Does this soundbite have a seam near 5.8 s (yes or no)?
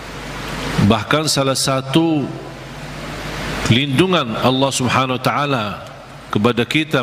no